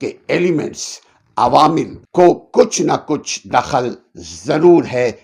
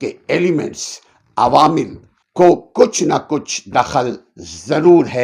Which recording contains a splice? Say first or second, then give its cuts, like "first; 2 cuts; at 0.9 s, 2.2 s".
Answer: first; 1 cut; at 2.0 s